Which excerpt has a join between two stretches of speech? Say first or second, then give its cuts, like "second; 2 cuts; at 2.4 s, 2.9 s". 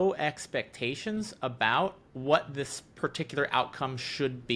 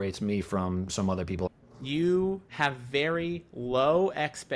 second; 2 cuts; at 1.5 s, 2.5 s